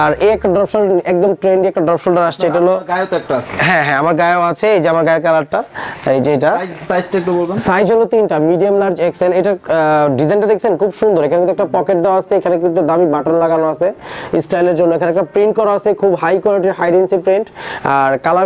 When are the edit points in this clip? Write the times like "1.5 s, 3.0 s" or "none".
none